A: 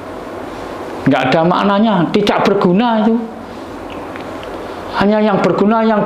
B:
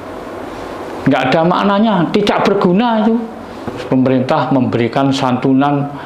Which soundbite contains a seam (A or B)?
B